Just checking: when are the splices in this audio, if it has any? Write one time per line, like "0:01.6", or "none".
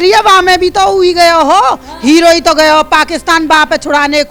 none